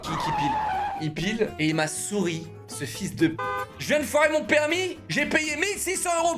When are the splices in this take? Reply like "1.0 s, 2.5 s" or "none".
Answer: 1.5 s, 3.7 s